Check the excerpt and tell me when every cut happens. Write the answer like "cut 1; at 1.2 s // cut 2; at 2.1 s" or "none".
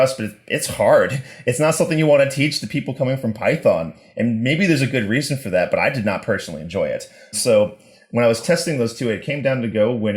none